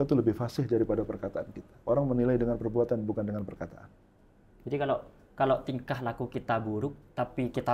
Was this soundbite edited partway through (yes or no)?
no